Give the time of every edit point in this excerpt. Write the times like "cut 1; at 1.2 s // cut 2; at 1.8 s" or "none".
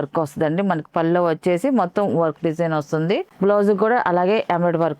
cut 1; at 3.3 s